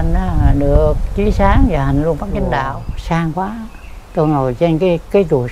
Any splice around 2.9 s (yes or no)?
yes